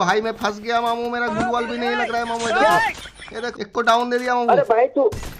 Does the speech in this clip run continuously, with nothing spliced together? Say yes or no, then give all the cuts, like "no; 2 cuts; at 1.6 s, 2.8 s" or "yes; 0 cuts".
no; 1 cut; at 3.4 s